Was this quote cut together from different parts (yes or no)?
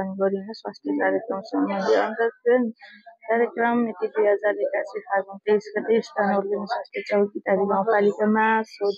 no